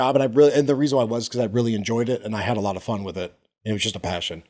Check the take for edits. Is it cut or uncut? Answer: uncut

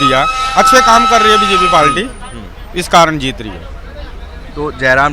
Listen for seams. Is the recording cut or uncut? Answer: uncut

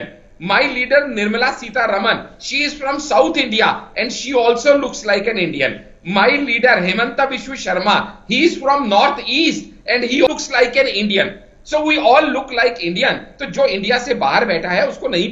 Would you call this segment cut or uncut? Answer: cut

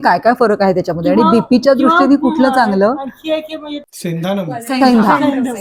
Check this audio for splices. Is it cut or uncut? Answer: uncut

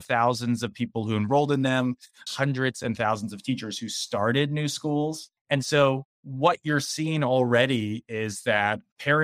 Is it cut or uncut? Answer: cut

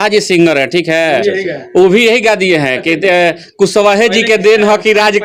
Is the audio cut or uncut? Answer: uncut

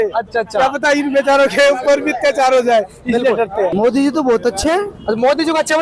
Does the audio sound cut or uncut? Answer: cut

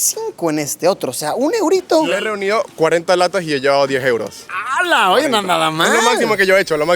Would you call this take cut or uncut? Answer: cut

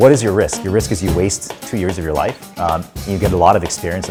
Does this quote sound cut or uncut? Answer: uncut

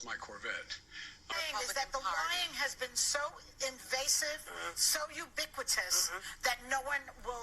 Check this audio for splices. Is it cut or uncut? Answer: cut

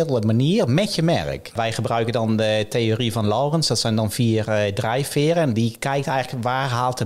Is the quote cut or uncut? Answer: cut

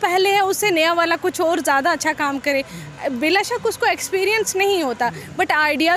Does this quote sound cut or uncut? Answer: uncut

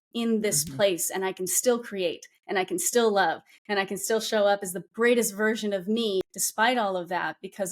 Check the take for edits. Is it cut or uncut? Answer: cut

